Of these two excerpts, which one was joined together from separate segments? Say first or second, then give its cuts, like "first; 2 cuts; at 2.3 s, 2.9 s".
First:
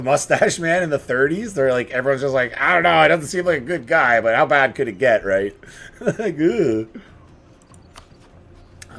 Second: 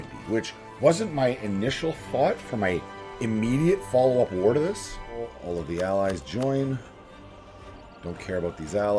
second; 1 cut; at 5.4 s